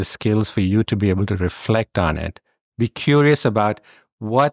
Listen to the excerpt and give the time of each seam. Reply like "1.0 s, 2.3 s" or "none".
2.6 s